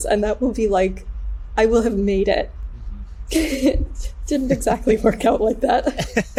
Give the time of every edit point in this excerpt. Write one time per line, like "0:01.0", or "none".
none